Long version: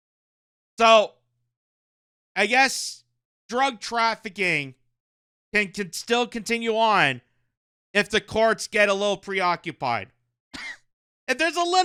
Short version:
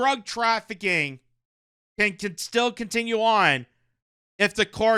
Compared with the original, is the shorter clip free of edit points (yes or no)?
yes